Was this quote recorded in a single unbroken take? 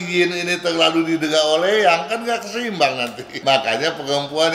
no; 1 cut; at 3.4 s

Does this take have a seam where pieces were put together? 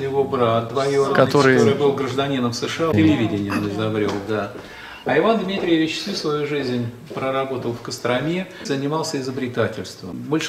yes; 2 cuts; at 2.9 s, 8.6 s

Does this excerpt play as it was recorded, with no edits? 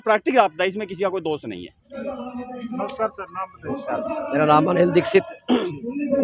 yes; 0 cuts

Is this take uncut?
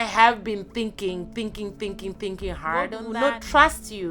no; 1 cut; at 3.0 s

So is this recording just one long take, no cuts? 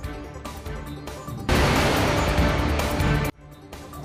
yes; 0 cuts

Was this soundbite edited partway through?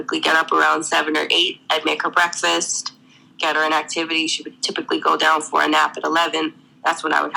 no; 0 cuts

